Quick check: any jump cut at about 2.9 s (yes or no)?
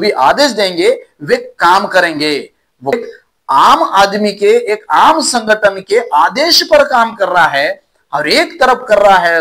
yes